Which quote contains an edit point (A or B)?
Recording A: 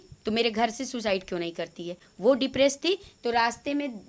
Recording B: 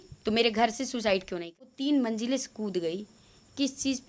B